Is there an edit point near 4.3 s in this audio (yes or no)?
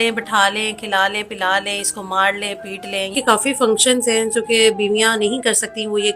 no